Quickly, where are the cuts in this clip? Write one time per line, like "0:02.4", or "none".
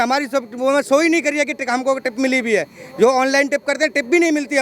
none